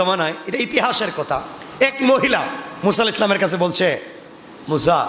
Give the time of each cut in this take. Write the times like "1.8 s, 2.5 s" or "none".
1.6 s, 2.6 s